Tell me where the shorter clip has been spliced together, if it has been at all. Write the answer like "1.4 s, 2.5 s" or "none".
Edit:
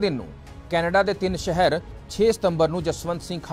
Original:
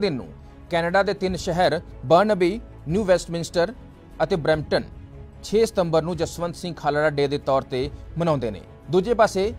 1.9 s